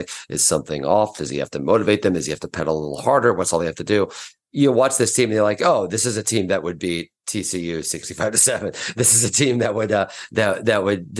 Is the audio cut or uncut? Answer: cut